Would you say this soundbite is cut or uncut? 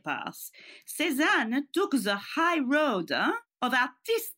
cut